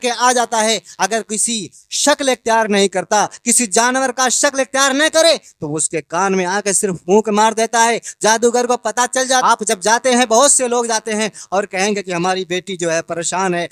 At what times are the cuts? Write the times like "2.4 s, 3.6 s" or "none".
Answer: 9.4 s

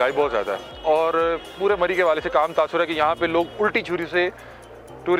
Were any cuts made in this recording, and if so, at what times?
none

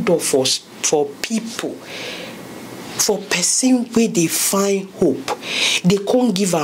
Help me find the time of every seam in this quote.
none

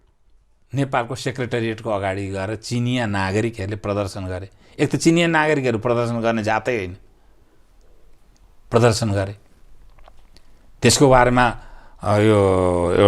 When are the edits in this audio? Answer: none

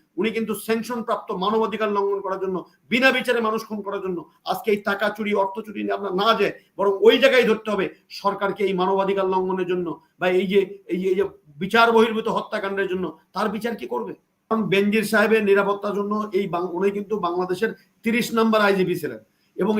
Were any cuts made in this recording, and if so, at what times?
14.5 s

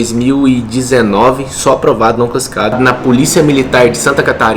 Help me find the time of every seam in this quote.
2.7 s

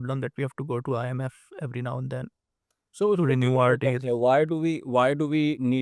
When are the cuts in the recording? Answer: none

